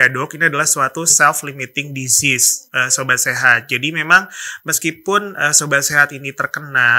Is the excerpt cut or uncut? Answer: uncut